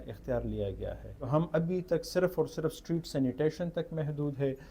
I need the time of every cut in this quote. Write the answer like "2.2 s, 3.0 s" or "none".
1.1 s